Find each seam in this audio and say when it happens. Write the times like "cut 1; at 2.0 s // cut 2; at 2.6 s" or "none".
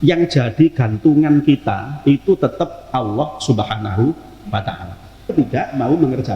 cut 1; at 5.3 s